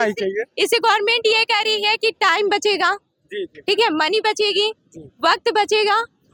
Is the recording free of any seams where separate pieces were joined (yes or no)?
yes